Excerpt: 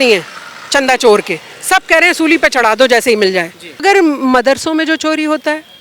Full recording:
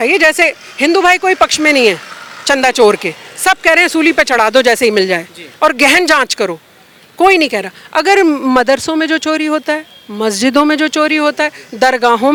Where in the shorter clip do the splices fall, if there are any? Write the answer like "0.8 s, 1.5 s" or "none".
3.8 s